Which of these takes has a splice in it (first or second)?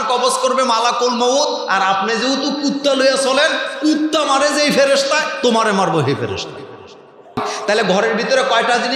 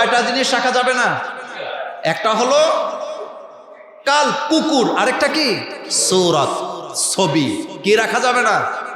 first